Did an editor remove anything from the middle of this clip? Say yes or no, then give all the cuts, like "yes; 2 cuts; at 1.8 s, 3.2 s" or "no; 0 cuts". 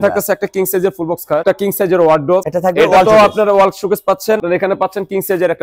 yes; 3 cuts; at 1.4 s, 2.4 s, 4.4 s